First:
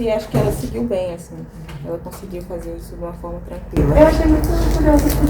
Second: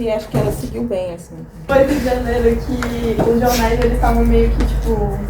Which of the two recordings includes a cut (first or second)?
second